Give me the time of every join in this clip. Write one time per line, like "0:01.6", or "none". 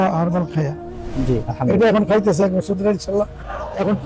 0:01.1